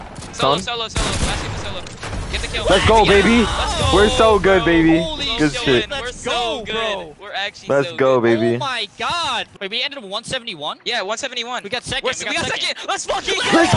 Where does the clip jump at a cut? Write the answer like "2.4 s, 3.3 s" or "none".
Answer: 7.2 s, 9.5 s